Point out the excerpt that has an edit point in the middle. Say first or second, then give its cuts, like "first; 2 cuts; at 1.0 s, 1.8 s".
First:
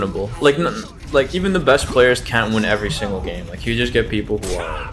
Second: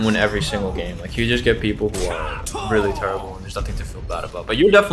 first; 1 cut; at 1.3 s